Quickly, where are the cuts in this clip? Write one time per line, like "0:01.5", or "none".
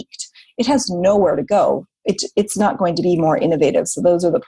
none